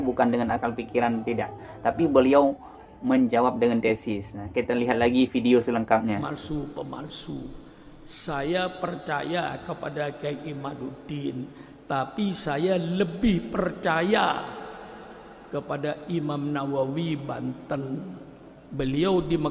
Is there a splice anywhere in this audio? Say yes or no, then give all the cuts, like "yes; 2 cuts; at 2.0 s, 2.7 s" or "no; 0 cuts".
yes; 1 cut; at 6.2 s